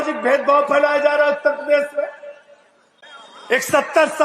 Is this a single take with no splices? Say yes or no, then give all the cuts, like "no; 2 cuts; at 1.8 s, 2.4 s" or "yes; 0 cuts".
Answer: yes; 0 cuts